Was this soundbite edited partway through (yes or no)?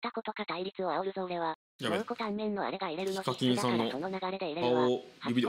no